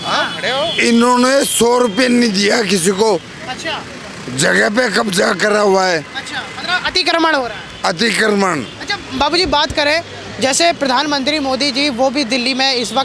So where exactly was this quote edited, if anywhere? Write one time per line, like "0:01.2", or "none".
none